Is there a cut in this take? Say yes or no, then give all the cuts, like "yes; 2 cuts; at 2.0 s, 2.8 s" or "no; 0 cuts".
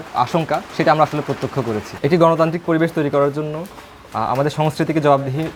no; 0 cuts